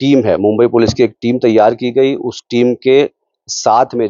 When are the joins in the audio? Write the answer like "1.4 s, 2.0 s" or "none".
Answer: none